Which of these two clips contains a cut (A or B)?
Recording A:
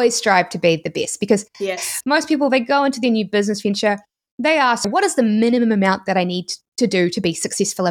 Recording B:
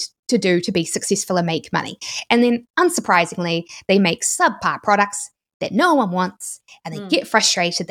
A